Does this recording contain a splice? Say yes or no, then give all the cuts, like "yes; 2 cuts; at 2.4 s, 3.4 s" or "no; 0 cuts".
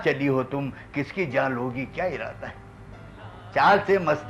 no; 0 cuts